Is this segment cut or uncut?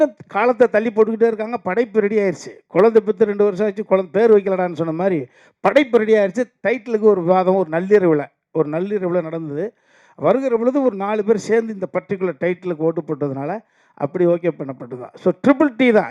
uncut